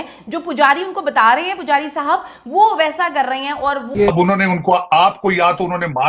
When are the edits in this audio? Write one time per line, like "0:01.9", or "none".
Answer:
0:04.1